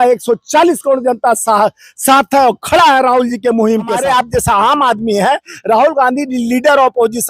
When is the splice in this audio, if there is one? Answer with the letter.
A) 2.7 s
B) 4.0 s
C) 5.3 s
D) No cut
B